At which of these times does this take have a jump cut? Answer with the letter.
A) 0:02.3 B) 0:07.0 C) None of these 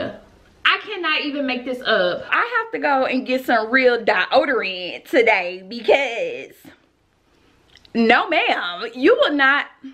A